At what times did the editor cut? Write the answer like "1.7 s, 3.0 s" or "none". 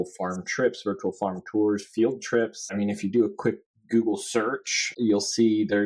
2.8 s, 4.8 s